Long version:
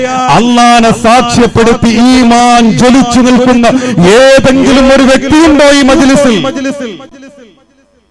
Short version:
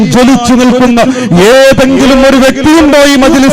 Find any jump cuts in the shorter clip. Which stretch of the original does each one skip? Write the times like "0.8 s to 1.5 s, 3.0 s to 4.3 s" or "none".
none

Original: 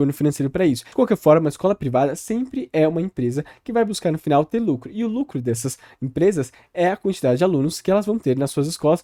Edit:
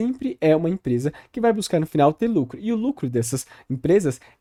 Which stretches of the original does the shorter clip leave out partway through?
none

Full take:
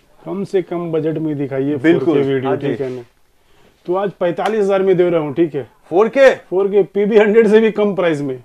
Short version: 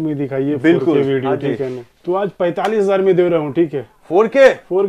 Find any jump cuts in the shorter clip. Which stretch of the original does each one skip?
3.1 s to 3.7 s

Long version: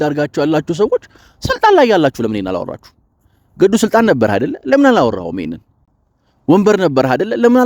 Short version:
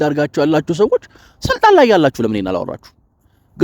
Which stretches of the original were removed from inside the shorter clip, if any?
none

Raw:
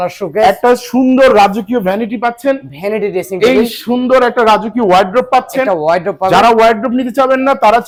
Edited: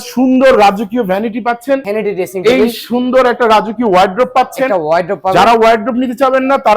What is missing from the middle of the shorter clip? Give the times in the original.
2.6 s to 2.8 s

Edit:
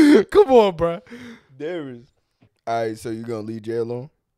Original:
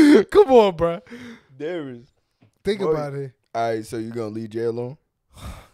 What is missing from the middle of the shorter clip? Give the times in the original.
2.5 s to 3.4 s

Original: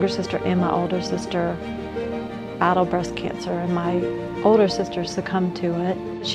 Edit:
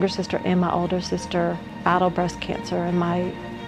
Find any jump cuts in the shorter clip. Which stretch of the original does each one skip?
1.7 s to 2.4 s

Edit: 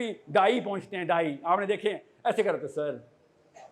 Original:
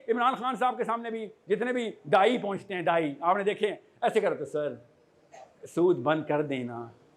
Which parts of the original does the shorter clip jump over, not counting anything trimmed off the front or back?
none

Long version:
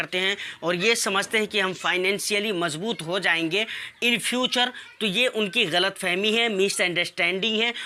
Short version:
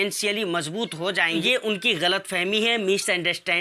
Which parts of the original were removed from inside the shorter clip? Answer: 3.5 s to 5.2 s

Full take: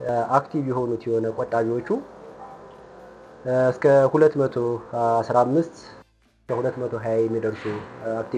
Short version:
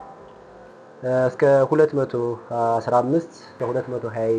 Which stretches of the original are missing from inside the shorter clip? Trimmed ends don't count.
5.8 s to 6.3 s

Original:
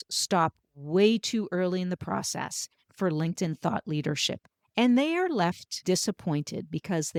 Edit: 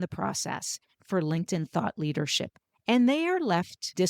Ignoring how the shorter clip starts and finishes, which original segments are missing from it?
none

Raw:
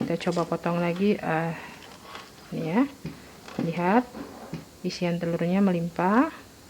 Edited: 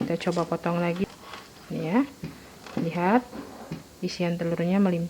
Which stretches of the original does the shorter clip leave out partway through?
1.0 s to 1.9 s

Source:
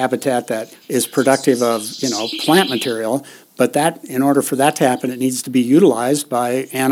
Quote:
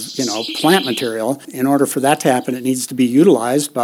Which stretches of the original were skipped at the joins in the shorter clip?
3.3 s to 4.0 s

